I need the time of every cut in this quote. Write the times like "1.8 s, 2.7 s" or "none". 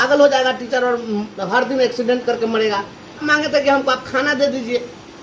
3.2 s